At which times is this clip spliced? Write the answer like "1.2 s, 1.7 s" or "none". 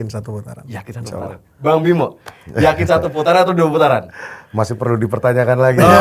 none